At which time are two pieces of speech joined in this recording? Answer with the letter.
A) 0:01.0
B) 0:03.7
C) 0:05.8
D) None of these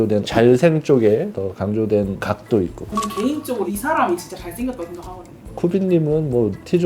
D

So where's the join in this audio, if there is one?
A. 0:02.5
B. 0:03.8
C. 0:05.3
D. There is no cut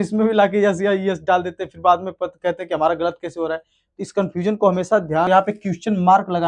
C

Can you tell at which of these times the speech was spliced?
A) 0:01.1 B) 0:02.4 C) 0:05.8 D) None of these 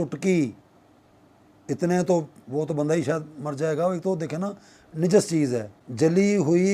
C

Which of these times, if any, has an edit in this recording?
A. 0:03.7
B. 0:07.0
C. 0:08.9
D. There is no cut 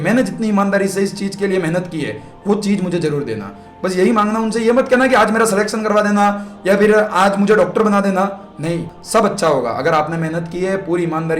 C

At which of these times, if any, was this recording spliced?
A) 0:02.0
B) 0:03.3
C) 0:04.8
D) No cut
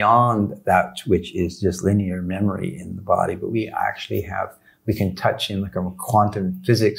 D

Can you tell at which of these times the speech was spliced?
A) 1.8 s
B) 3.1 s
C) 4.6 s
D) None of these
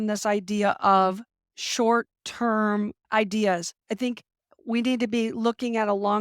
B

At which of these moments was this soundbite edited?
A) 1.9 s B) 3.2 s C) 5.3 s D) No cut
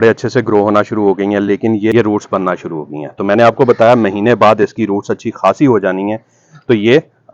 A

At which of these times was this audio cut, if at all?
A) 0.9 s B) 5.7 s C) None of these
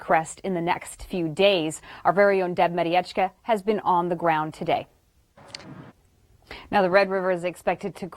B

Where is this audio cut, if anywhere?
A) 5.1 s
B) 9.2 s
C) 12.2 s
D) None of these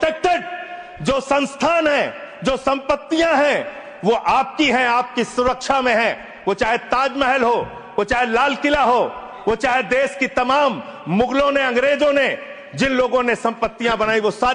D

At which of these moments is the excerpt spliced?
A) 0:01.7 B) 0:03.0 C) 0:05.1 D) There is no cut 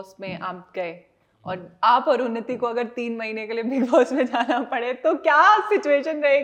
D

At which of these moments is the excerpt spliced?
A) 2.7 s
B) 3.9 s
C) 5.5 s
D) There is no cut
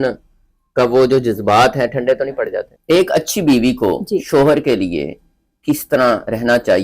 A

